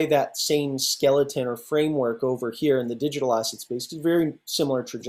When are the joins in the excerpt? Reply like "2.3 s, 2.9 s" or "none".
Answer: none